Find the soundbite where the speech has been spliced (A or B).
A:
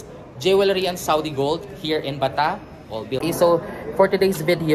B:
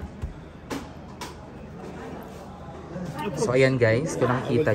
A